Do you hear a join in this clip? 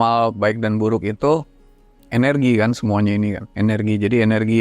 no; 0 cuts

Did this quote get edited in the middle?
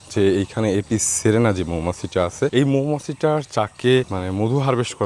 yes; 2 cuts; at 2.5 s, 4.2 s

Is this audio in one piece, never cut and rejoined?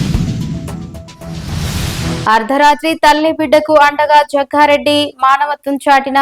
yes; 0 cuts

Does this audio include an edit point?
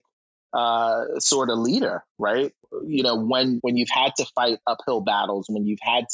yes; 1 cut; at 3.6 s

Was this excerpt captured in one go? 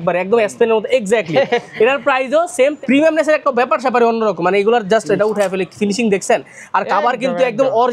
no; 1 cut; at 2.8 s

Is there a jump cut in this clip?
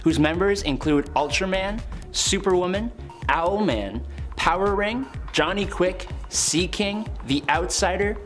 no; 0 cuts

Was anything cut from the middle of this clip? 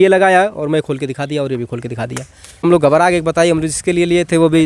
yes; 1 cut; at 2.6 s

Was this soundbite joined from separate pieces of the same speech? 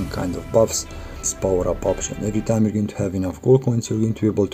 yes; 1 cut; at 1.2 s

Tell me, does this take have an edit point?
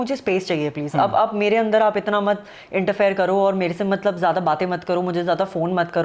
no; 0 cuts

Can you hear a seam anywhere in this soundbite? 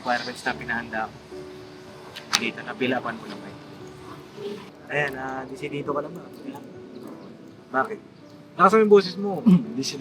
yes; 1 cut; at 4.8 s

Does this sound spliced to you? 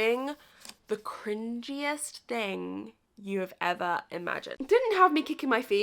yes; 1 cut; at 4.5 s

